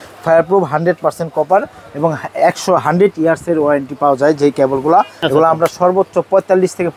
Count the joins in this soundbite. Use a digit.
1